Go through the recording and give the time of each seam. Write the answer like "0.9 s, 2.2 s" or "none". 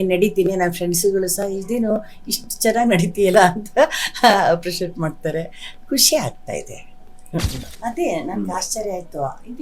7.6 s